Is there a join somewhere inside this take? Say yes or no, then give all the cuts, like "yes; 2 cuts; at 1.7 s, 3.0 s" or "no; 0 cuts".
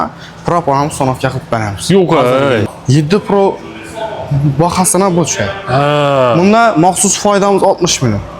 yes; 1 cut; at 2.7 s